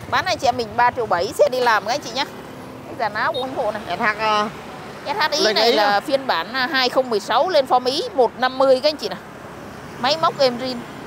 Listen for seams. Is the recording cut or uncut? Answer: cut